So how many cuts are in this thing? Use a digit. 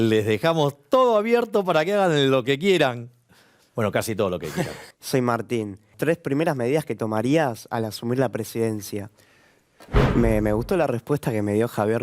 3